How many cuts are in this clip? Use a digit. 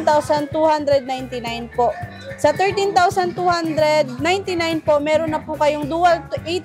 0